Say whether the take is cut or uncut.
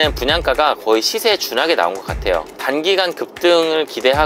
cut